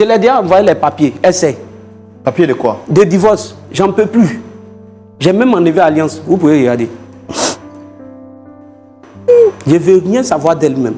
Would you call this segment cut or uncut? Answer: uncut